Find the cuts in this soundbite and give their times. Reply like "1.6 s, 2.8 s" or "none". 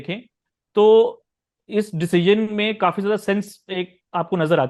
none